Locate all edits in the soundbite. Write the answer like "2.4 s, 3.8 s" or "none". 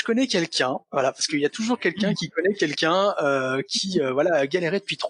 none